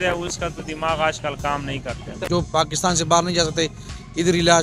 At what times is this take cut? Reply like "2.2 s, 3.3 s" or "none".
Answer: 2.1 s